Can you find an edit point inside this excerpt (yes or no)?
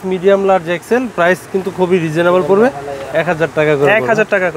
no